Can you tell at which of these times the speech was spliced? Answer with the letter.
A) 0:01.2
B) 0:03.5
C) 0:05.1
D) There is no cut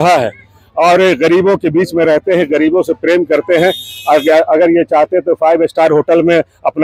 D